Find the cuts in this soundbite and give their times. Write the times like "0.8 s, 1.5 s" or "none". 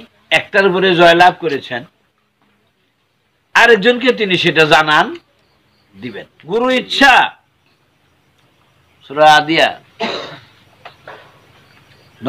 6.3 s